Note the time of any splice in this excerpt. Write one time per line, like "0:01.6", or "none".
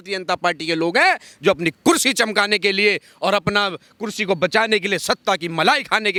none